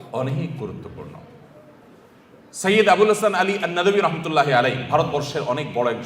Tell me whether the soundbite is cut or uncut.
uncut